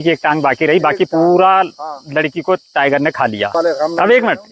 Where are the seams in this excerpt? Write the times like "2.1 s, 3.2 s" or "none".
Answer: 3.6 s

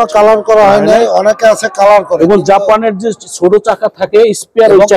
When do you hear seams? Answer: none

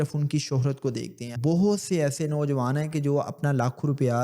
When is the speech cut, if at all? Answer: 1.3 s

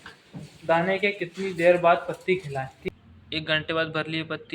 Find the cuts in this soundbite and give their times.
2.8 s

